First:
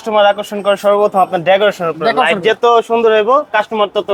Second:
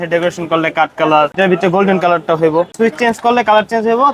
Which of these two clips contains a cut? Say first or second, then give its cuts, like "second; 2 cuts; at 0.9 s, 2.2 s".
second; 2 cuts; at 1.3 s, 2.7 s